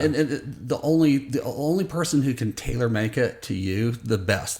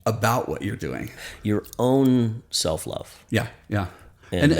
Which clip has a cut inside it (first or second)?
second